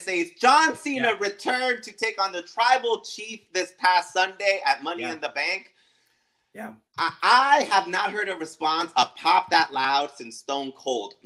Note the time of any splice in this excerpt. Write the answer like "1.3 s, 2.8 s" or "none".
none